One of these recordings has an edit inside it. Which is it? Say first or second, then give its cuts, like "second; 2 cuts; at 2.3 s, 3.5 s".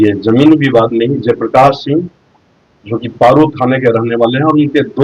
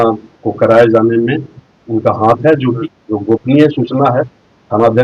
second; 1 cut; at 2.9 s